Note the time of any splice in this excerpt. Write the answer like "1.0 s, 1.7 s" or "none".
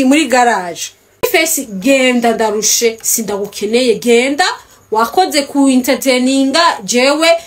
1.2 s